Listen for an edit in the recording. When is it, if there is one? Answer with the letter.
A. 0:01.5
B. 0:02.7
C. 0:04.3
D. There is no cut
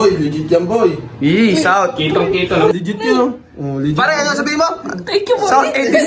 B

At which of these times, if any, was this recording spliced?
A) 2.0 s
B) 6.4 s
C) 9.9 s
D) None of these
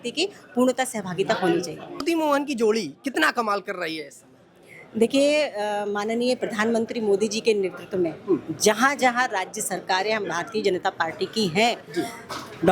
A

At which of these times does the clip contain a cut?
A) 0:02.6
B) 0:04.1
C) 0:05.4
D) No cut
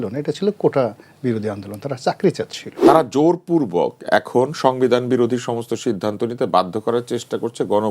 A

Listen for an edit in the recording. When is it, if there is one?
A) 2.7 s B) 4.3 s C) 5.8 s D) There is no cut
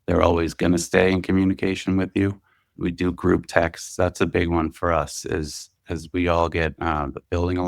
A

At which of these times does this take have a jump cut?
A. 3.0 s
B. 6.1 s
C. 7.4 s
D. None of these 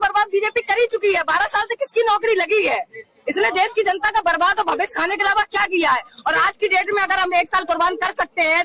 D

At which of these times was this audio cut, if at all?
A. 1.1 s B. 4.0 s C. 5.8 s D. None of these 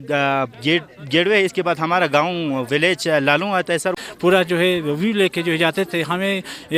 B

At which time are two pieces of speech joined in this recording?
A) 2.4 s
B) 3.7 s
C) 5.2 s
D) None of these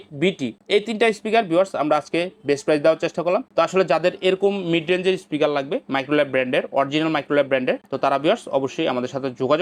D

